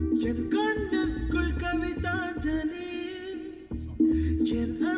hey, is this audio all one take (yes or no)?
yes